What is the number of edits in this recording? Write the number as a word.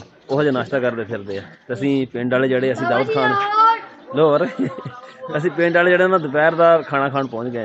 zero